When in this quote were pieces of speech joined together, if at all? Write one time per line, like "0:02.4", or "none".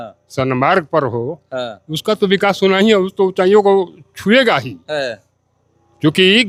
none